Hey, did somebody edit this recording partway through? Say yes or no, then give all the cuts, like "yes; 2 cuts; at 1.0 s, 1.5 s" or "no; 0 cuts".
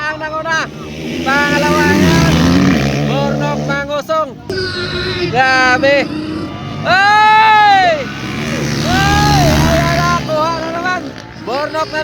yes; 1 cut; at 4.5 s